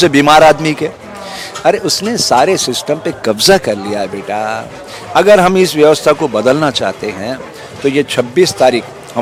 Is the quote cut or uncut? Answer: uncut